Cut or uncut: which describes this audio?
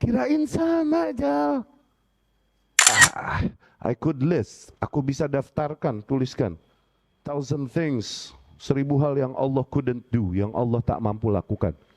cut